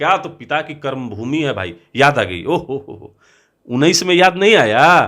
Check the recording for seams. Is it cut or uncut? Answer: uncut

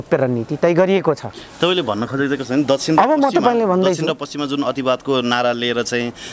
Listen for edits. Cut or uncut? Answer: uncut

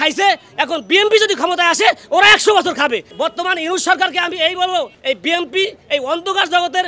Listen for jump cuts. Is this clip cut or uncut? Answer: cut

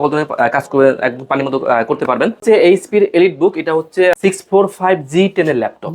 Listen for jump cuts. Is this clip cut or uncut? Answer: cut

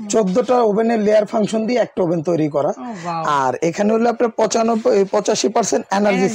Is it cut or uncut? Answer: uncut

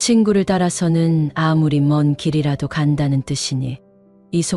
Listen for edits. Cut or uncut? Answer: uncut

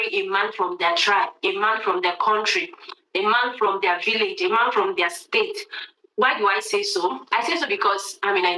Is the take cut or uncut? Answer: uncut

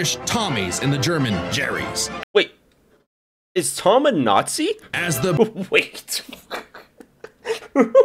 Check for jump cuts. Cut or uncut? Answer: uncut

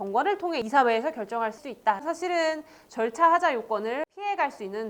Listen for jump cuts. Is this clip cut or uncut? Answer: cut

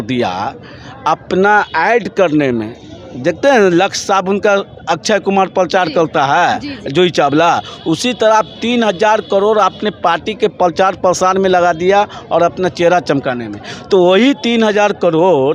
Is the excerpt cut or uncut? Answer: uncut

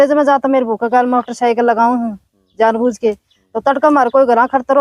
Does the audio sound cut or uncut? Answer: uncut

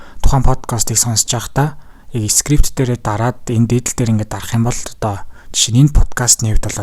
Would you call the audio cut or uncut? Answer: uncut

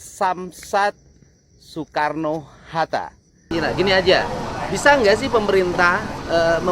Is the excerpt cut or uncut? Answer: cut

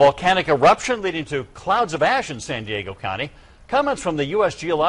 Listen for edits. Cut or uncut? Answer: uncut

